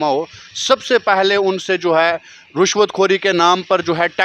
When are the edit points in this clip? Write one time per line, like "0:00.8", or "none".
none